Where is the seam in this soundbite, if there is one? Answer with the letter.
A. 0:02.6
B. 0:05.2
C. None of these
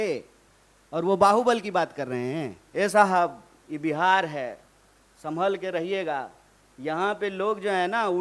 A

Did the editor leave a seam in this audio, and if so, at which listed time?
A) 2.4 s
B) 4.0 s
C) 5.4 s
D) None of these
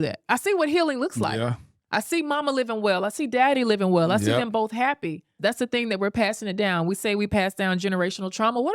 C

